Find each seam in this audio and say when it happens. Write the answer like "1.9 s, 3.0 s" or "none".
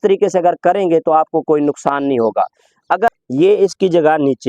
3.1 s